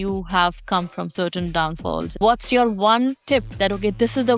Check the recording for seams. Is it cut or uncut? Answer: cut